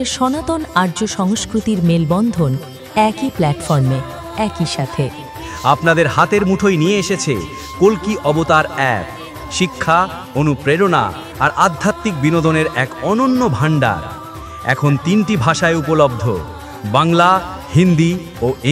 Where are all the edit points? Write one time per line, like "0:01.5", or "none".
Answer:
none